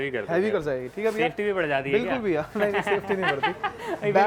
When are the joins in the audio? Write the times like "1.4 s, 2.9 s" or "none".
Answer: none

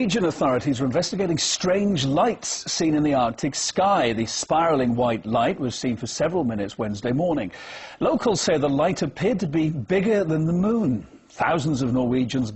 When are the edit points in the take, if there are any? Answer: 2.2 s

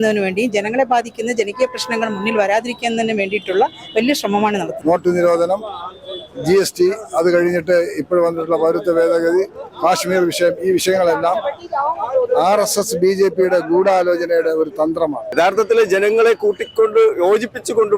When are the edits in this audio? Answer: 4.7 s, 15.2 s

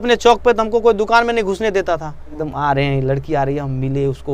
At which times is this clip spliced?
2.4 s

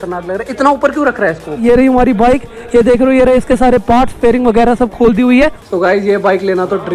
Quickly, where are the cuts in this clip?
1.6 s, 5.6 s

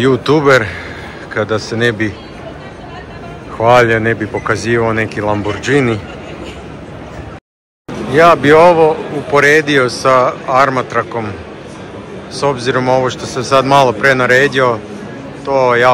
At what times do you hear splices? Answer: 7.9 s

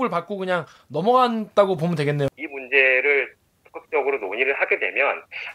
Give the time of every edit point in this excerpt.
2.3 s

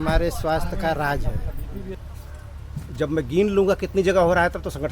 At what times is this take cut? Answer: 2.1 s

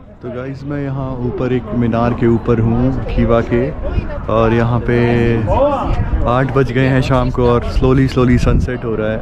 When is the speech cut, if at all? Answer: none

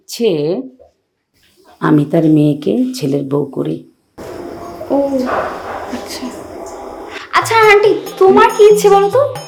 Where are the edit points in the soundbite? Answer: none

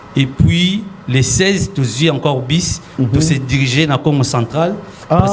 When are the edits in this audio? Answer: none

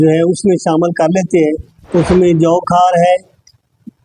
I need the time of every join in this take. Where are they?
none

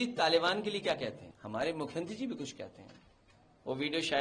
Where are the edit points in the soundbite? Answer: 1.3 s

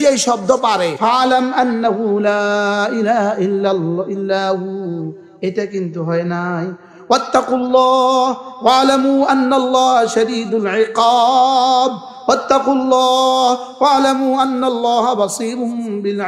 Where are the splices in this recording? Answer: 1.0 s

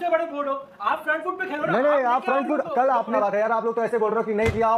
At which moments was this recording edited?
3.1 s

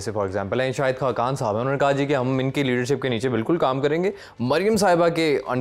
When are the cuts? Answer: none

